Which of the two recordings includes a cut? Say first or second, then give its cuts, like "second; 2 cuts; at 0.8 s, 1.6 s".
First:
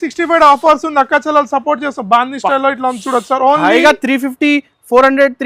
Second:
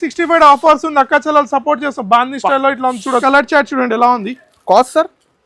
second; 1 cut; at 3.2 s